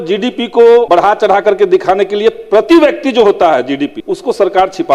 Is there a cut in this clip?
yes; 2 cuts; at 0.9 s, 4.0 s

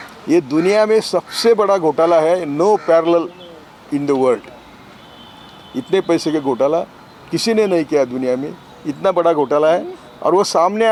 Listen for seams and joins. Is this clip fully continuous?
yes; 0 cuts

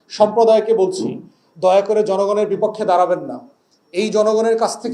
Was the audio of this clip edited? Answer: no; 0 cuts

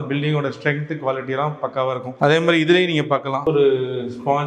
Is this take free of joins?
no; 2 cuts; at 2.1 s, 3.4 s

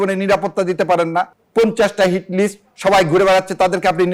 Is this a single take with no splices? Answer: yes; 0 cuts

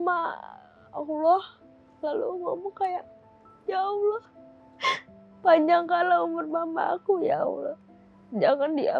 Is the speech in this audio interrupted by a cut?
no; 0 cuts

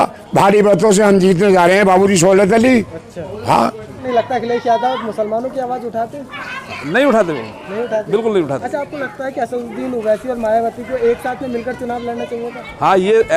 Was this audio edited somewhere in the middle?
yes; 1 cut; at 4.0 s

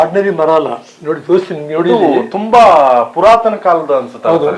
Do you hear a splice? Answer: no; 0 cuts

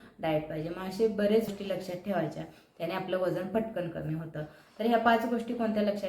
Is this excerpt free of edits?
no; 1 cut; at 1.5 s

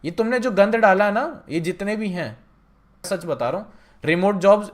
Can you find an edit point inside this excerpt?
yes; 1 cut; at 3.1 s

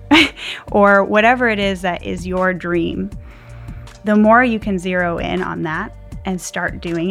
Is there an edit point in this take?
no; 0 cuts

